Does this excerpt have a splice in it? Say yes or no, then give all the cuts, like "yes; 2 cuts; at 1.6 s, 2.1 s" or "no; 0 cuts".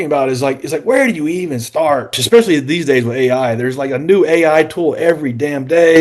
yes; 1 cut; at 2.1 s